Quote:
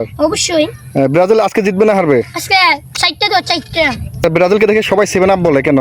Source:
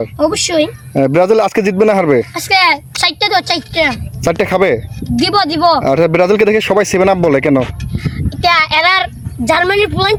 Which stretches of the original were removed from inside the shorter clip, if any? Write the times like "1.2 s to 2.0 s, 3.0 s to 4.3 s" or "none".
4.2 s to 6.0 s